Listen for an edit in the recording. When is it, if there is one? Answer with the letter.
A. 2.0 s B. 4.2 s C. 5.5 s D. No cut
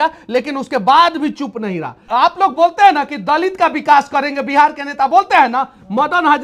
A